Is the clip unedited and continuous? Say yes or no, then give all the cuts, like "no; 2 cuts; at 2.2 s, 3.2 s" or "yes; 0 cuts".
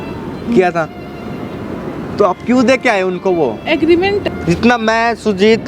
no; 1 cut; at 4.3 s